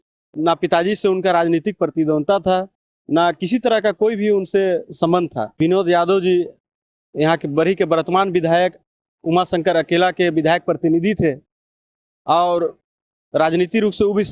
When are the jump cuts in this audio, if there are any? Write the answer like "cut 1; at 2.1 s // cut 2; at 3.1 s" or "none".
cut 1; at 5.5 s